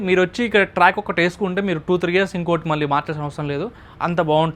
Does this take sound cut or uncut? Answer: uncut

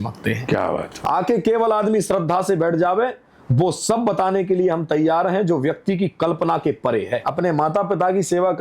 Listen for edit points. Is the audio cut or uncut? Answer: cut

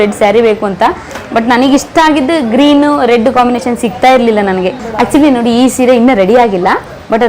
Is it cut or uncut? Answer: uncut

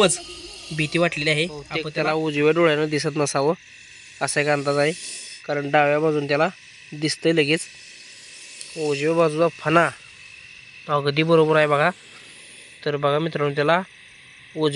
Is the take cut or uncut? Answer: cut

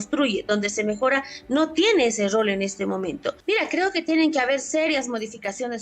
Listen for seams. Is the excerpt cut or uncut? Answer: cut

